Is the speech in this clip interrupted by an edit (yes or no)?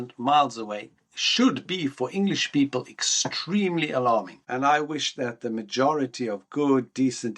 yes